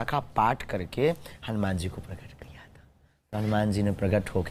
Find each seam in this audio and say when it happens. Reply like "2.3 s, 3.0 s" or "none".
none